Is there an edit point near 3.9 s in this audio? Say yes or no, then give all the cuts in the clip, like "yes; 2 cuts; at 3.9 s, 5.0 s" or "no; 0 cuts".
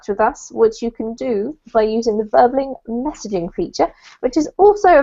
yes; 1 cut; at 3.9 s